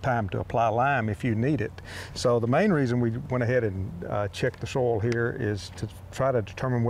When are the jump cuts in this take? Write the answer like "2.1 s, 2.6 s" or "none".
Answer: none